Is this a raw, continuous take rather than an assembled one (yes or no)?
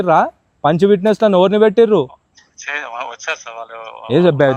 yes